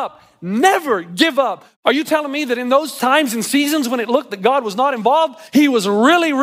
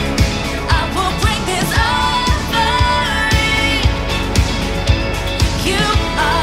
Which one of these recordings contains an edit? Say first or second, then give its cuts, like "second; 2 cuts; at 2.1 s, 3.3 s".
first; 3 cuts; at 1.6 s, 2.9 s, 5.4 s